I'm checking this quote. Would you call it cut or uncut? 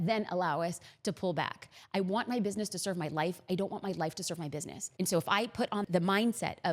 uncut